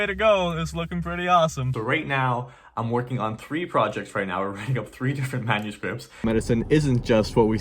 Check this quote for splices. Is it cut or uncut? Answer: cut